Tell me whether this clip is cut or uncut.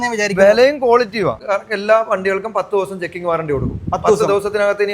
cut